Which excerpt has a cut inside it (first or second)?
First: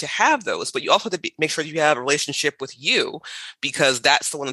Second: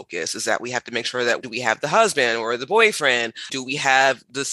second